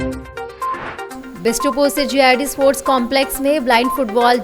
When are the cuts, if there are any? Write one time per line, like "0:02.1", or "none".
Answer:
0:01.2